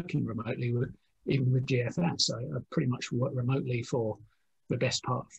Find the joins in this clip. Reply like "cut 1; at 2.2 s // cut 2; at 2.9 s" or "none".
none